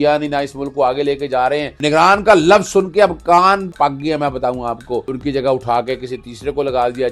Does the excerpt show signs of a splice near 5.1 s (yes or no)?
yes